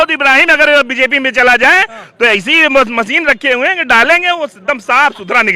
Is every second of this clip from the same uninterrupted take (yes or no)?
yes